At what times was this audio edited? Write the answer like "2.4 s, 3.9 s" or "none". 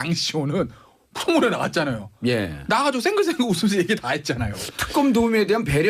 3.0 s